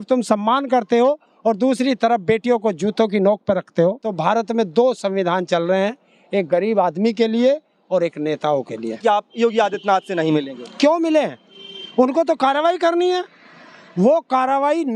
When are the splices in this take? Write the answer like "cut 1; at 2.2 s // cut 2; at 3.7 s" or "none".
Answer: cut 1; at 4.1 s // cut 2; at 9.0 s